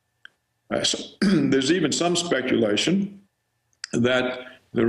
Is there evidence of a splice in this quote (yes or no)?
yes